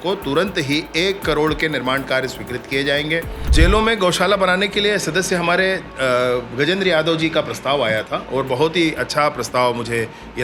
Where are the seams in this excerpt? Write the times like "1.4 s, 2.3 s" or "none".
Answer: 3.5 s